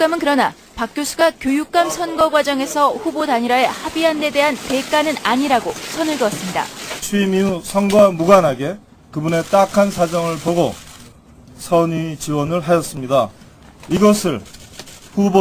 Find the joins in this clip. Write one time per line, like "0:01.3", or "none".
none